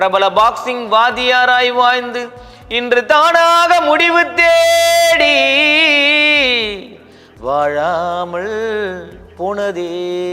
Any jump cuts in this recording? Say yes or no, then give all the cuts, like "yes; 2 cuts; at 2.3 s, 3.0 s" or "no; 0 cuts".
no; 0 cuts